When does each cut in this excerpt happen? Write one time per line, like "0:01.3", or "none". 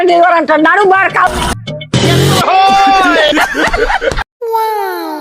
0:04.2